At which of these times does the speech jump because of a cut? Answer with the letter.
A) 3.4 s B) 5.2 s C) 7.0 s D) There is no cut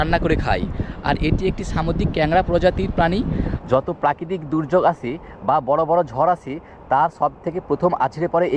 A